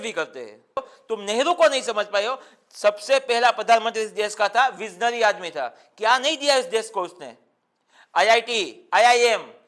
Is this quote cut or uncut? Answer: cut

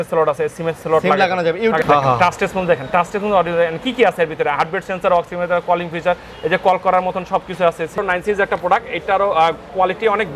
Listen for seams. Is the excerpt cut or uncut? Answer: cut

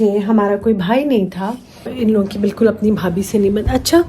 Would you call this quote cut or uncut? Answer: cut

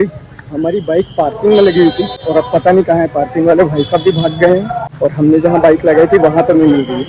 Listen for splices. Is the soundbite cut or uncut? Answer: cut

